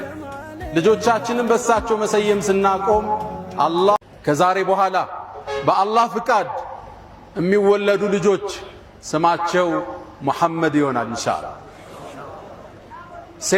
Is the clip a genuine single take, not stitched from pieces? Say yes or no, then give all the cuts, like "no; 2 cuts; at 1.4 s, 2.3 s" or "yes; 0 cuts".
no; 1 cut; at 4.0 s